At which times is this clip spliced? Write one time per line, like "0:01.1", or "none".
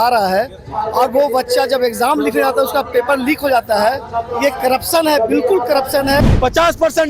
0:06.2